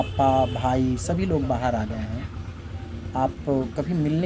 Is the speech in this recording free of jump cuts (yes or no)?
yes